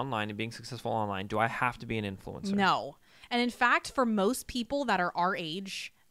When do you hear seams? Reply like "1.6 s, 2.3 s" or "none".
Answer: none